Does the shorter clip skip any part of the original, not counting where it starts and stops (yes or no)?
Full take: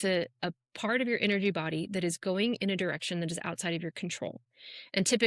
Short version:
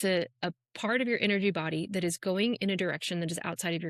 no